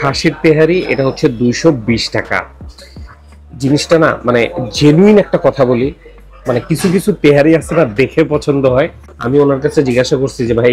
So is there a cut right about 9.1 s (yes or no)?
yes